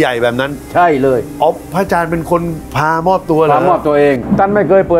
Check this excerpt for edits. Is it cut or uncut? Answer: cut